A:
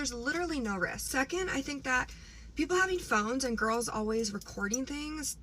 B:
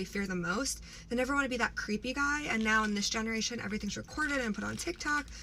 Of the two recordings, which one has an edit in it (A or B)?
A